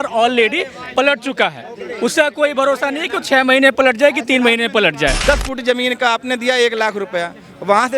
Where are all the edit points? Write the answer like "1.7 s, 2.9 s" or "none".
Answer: 5.2 s